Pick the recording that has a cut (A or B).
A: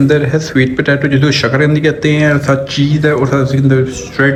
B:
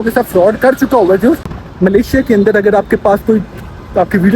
B